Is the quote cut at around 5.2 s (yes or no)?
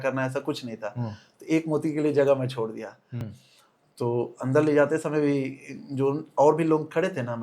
no